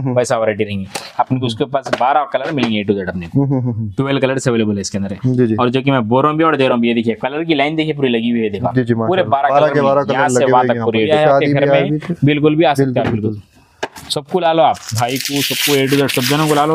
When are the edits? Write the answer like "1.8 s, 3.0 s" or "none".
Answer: 1.0 s, 11.1 s